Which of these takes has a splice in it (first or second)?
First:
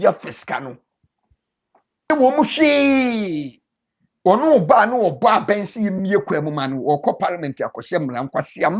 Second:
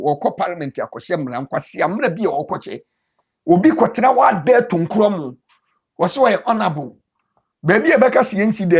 first